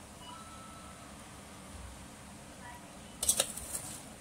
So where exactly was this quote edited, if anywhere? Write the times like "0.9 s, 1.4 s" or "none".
2.9 s